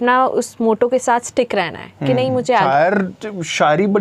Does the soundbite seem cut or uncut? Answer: cut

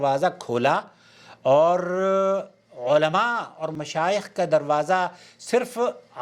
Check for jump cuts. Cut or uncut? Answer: uncut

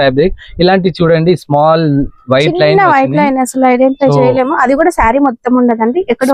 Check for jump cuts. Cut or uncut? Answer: uncut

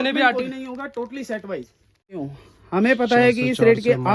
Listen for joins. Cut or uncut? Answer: cut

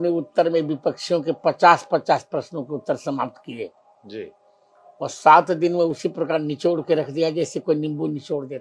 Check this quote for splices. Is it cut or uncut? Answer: uncut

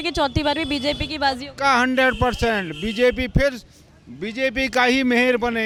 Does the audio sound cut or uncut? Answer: uncut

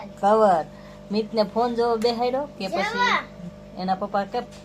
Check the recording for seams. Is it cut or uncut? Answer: uncut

